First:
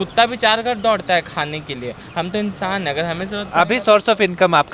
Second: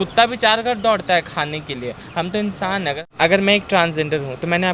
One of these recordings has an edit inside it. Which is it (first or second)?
second